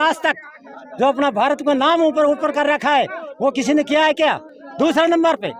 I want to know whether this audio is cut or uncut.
uncut